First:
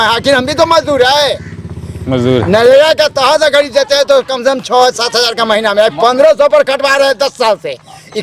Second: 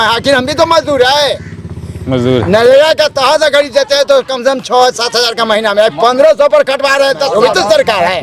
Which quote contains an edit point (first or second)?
second